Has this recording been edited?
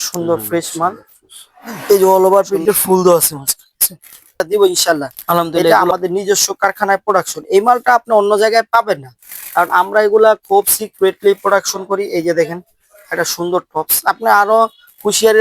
yes; 2 cuts; at 2.1 s, 4.4 s

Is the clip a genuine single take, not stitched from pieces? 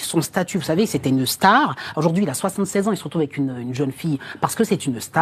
yes; 0 cuts

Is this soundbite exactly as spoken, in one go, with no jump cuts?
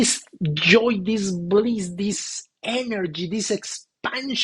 yes; 0 cuts

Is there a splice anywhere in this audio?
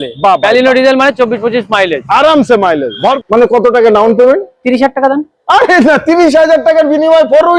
yes; 1 cut; at 3.2 s

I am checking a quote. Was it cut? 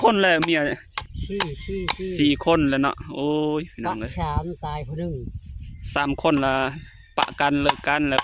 yes; 1 cut; at 1.1 s

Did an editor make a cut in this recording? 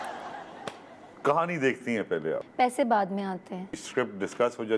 yes; 3 cuts; at 1.0 s, 2.4 s, 3.6 s

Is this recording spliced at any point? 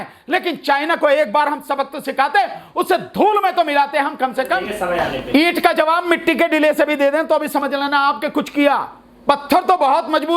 yes; 1 cut; at 4.7 s

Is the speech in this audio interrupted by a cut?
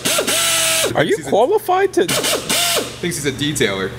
yes; 1 cut; at 0.9 s

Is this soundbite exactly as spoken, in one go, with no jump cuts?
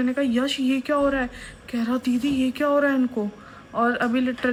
yes; 0 cuts

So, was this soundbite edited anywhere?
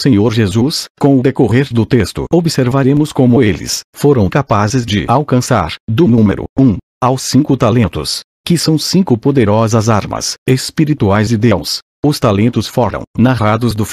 no; 0 cuts

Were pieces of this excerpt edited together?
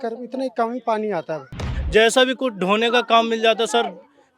yes; 1 cut; at 1.7 s

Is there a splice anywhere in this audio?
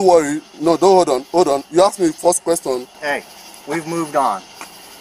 yes; 1 cut; at 3.0 s

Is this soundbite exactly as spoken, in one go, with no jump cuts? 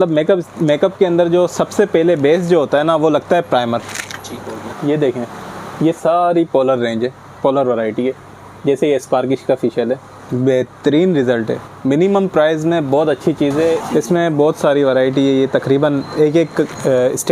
no; 2 cuts; at 4.7 s, 13.8 s

